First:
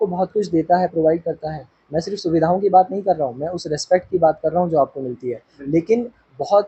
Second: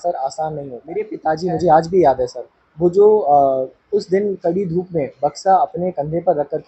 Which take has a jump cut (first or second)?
second